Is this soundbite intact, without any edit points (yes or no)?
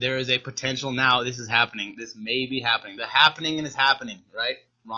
yes